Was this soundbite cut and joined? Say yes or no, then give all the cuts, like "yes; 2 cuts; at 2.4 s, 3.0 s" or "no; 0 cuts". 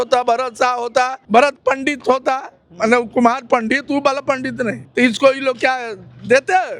yes; 2 cuts; at 1.2 s, 4.8 s